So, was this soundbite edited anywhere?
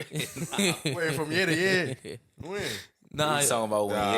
no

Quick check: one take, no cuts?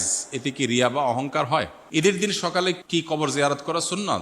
no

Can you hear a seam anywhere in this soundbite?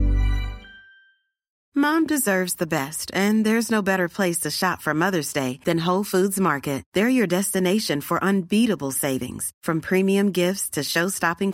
yes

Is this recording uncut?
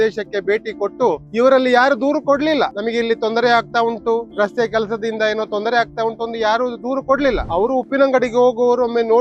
no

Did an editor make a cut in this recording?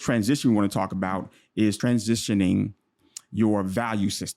yes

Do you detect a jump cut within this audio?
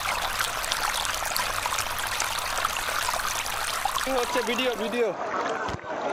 no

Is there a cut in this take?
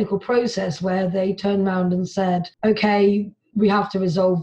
yes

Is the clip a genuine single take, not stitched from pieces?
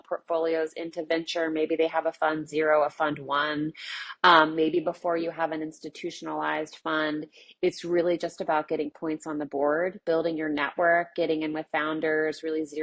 yes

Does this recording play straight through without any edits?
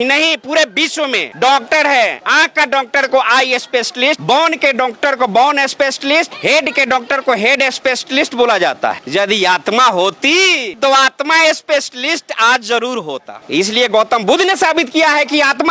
yes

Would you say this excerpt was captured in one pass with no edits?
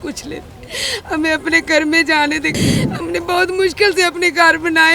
no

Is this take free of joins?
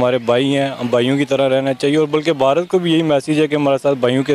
yes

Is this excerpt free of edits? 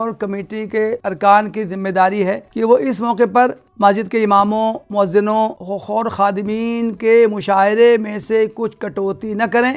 no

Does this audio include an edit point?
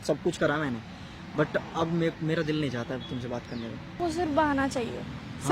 yes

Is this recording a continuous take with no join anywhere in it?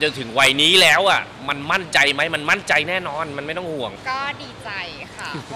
no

